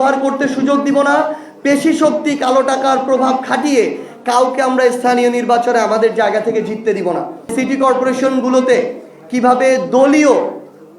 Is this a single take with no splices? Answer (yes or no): no